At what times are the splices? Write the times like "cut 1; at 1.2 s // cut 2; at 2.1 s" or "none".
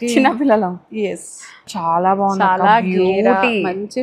cut 1; at 1.7 s